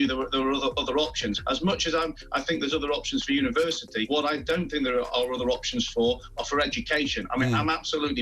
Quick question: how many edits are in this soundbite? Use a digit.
2